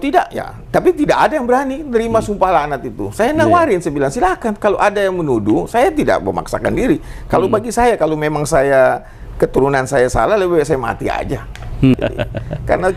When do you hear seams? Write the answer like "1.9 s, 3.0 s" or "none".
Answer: 11.9 s